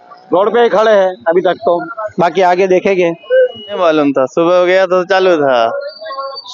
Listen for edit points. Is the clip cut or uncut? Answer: cut